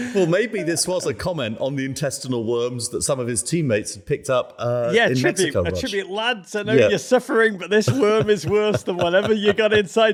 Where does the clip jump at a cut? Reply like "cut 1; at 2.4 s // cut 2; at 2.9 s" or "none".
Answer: none